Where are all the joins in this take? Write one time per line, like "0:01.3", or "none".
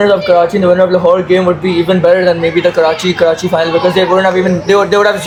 none